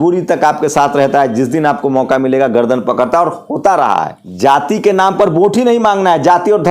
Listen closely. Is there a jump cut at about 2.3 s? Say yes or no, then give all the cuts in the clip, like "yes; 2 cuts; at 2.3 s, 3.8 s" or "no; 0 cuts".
no; 1 cut; at 4.2 s